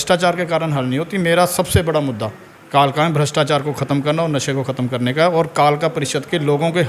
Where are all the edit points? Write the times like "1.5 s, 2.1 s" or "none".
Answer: none